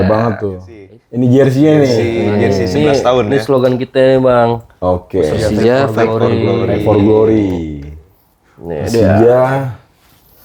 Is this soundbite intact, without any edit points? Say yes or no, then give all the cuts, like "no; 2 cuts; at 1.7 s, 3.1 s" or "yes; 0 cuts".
no; 1 cut; at 1.0 s